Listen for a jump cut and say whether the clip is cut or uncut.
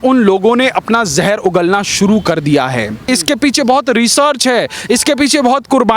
cut